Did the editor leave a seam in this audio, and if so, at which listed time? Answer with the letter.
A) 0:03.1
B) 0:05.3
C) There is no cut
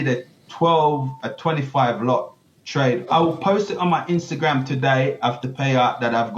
A